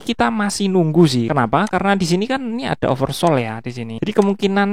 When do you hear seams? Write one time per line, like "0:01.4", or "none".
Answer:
0:01.3
0:03.9